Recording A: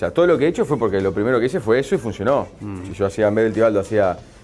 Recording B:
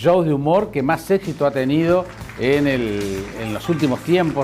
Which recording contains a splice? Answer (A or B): B